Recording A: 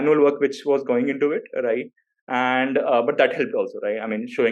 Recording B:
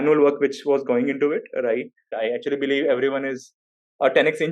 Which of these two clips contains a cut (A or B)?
B